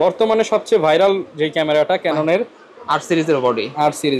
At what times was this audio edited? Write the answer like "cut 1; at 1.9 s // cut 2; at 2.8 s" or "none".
none

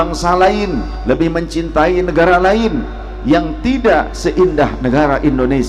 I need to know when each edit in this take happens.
cut 1; at 0.9 s

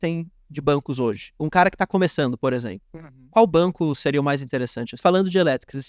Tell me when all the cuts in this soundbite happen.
cut 1; at 1.3 s // cut 2; at 5.0 s

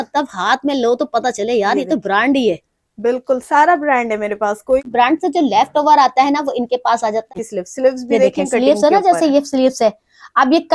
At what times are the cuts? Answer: cut 1; at 4.9 s // cut 2; at 7.3 s

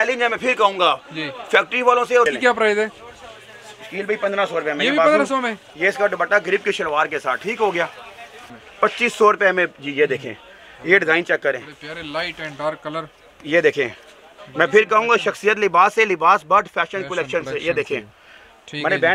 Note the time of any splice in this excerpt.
cut 1; at 2.3 s // cut 2; at 8.6 s

